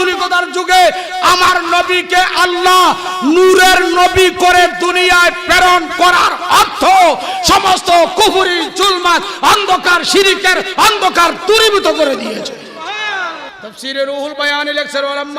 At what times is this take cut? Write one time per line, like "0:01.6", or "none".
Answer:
0:13.5